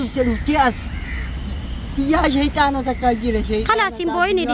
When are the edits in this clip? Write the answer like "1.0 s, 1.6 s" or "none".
none